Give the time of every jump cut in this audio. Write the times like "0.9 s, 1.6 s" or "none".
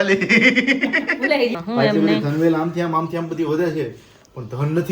1.5 s